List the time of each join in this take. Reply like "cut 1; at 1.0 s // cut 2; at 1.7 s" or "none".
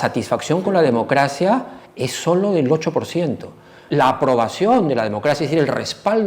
cut 1; at 3.8 s